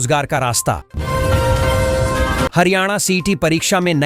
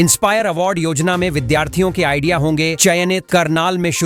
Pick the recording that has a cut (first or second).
first